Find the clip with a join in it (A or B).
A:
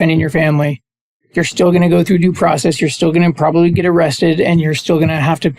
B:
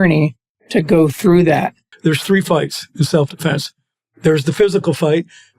B